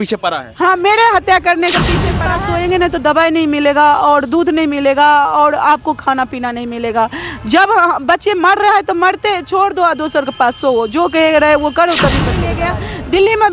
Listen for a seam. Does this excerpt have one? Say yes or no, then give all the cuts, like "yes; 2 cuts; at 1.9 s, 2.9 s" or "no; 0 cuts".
yes; 2 cuts; at 2.1 s, 12.6 s